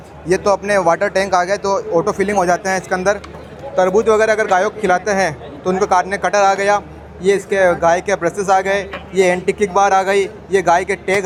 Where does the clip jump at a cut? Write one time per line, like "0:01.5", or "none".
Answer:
none